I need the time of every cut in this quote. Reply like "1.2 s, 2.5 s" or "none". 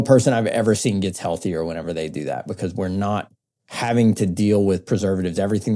none